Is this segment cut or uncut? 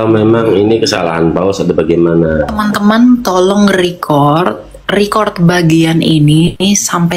cut